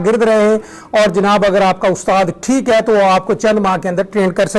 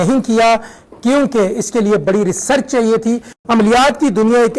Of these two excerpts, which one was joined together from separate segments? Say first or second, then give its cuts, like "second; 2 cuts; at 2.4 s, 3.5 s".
second; 1 cut; at 3.3 s